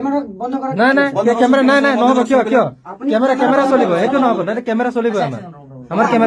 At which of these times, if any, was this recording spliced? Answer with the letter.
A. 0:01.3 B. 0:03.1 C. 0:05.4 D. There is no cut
D